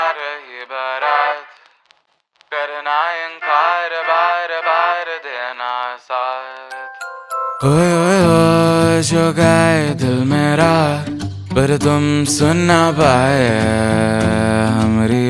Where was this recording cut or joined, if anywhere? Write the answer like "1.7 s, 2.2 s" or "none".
none